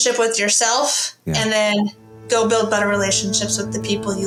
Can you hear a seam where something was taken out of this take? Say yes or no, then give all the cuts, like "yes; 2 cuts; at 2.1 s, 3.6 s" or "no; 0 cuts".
no; 0 cuts